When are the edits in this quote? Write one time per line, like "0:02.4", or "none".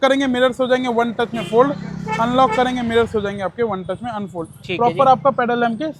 none